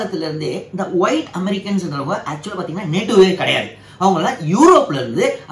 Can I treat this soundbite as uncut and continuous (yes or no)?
yes